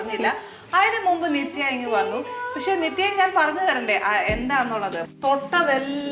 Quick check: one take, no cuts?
no; 1 cut; at 5.0 s

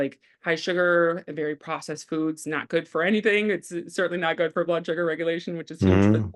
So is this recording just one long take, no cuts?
yes; 0 cuts

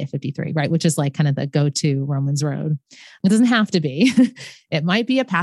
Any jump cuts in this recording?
yes; 1 cut; at 3.2 s

